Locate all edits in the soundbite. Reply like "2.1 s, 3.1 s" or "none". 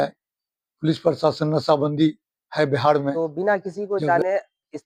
3.1 s